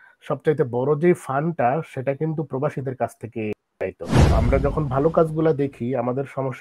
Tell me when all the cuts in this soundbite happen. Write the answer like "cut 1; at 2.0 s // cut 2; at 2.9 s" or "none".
cut 1; at 4.3 s

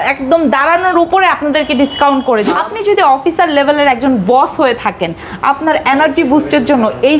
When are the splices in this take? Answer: cut 1; at 2.5 s

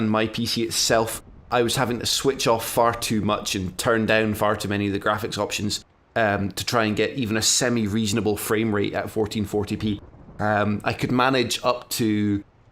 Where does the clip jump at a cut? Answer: cut 1; at 9.5 s

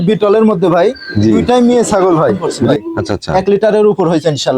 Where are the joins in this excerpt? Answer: cut 1; at 2.5 s

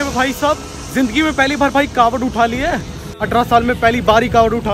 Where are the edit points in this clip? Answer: cut 1; at 3.2 s

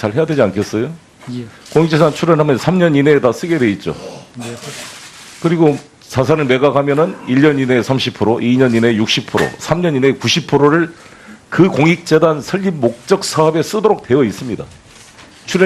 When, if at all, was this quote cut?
cut 1; at 11.3 s

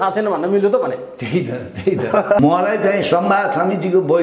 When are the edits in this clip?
cut 1; at 2.4 s

